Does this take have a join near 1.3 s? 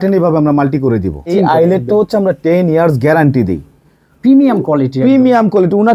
yes; 1 cut; at 1.3 s

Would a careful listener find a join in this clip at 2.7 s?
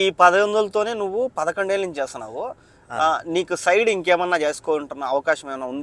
no; 0 cuts

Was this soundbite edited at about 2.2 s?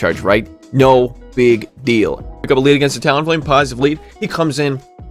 yes; 1 cut; at 2.2 s

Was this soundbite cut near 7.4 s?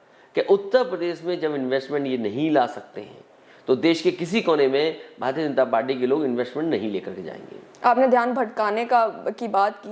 no; 0 cuts

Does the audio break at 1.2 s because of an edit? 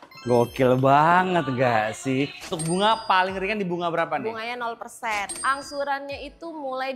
no; 2 cuts; at 2.6 s, 5.3 s

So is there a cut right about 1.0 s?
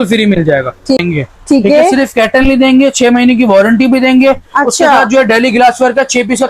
yes; 1 cut; at 1.0 s

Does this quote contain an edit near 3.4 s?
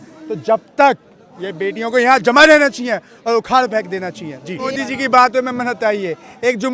no; 1 cut; at 4.7 s

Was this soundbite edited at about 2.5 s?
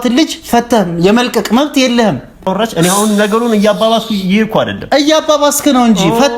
yes; 1 cut; at 2.5 s

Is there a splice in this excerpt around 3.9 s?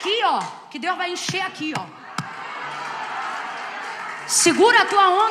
no; 0 cuts

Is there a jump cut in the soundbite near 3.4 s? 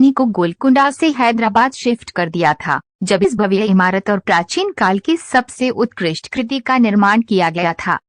yes; 1 cut; at 3.4 s

